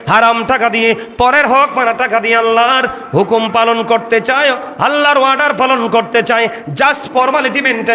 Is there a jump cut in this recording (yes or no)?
no